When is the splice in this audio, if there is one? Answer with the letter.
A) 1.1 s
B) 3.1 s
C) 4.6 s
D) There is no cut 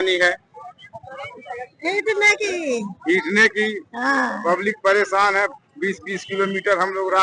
D